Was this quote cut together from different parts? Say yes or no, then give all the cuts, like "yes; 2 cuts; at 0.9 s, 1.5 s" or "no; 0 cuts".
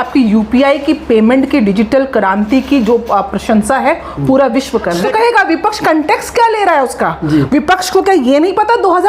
yes; 1 cut; at 5.0 s